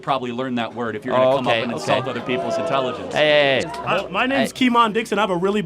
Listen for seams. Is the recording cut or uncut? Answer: cut